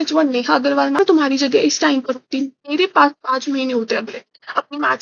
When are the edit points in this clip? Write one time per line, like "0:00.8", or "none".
0:01.0

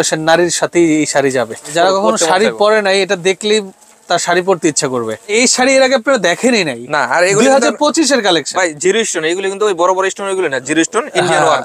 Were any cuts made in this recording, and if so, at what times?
0:01.6
0:05.2

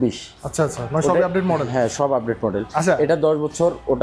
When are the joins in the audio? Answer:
none

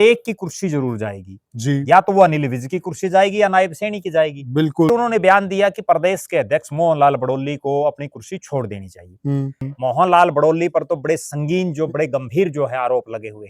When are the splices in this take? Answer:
0:04.9
0:09.6

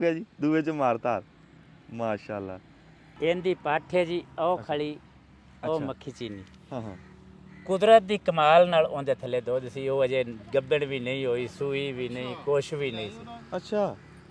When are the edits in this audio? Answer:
0:03.0

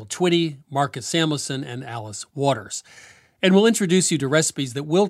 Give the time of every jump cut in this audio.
none

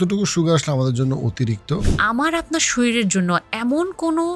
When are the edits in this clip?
0:01.9

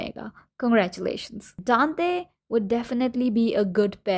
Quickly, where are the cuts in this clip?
0:01.6

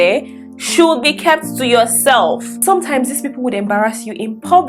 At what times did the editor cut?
0:02.5

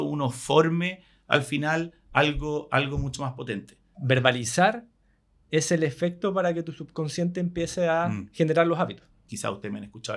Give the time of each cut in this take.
0:03.9
0:09.2

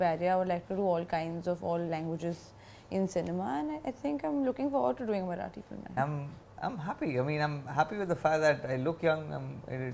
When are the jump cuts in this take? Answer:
0:05.9

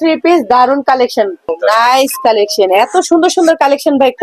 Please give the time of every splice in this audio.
0:01.5

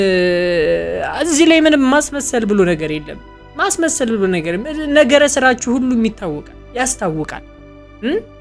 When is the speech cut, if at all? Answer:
none

